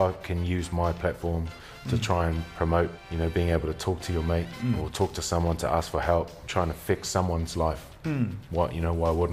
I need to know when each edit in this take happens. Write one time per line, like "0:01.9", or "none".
0:03.0
0:06.4